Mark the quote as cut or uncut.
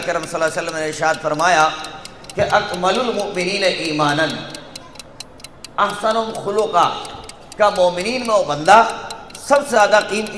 uncut